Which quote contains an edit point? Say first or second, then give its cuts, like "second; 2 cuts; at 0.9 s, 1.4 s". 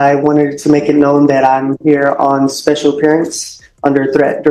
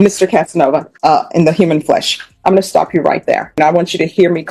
second; 2 cuts; at 0.9 s, 3.6 s